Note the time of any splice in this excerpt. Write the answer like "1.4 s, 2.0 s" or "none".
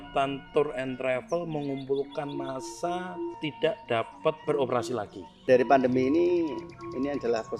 3.4 s, 4.4 s, 5.5 s